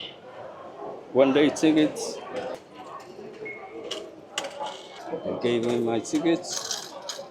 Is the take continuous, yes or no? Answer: no